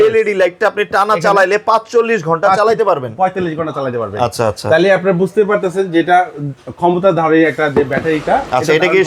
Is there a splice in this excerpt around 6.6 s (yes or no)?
no